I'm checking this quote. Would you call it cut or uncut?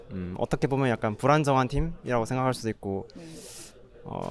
uncut